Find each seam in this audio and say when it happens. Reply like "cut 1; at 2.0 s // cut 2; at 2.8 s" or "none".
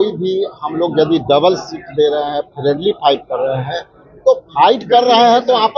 none